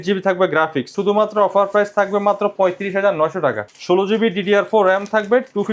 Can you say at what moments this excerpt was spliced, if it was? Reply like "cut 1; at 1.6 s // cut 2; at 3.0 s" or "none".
cut 1; at 1.0 s // cut 2; at 3.7 s